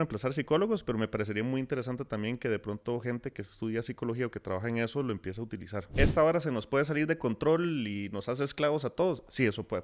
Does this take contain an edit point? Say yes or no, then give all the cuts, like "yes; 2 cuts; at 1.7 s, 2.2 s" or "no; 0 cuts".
yes; 1 cut; at 5.8 s